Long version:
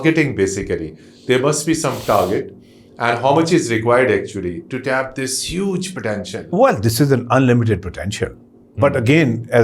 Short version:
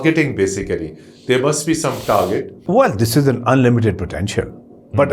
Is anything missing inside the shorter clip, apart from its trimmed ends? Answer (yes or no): yes